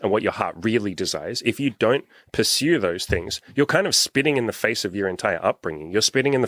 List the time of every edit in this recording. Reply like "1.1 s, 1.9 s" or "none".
none

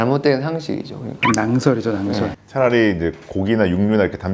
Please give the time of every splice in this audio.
none

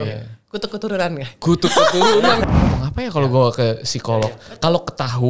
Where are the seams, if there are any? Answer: 2.4 s

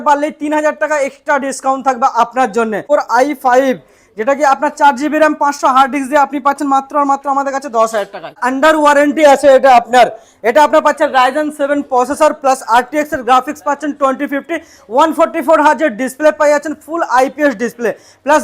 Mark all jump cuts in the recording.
2.8 s, 8.4 s

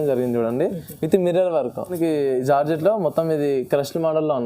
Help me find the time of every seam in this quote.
1.9 s

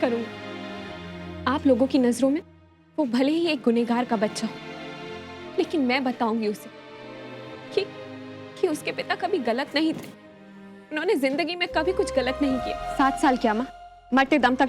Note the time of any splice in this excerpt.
12.8 s

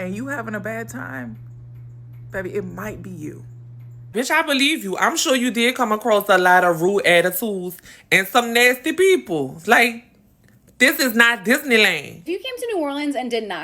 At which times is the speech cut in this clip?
4.1 s, 12.4 s

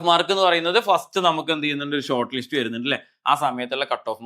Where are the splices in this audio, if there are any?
none

